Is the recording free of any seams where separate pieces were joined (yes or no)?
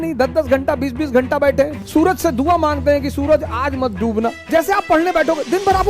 no